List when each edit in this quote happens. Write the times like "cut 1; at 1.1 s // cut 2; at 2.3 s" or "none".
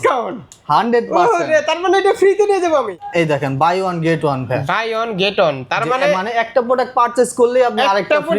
cut 1; at 2.9 s